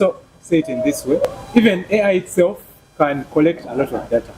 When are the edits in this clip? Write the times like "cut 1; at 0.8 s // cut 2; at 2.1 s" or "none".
cut 1; at 1.2 s